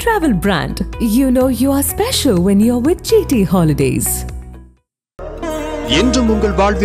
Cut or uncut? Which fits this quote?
uncut